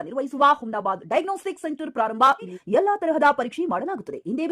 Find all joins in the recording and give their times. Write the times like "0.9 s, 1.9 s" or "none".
2.6 s